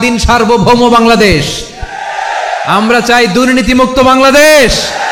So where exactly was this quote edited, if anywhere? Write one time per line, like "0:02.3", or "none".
none